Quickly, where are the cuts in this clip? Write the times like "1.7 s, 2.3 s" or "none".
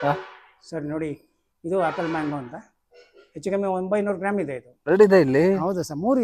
4.9 s